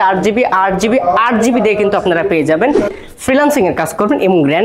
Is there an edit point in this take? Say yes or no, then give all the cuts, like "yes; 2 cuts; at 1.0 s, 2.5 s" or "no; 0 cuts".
yes; 1 cut; at 3.0 s